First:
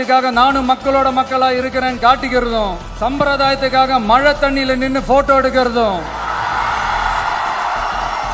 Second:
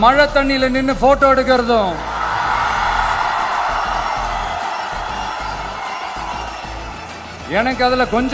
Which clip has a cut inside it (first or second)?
first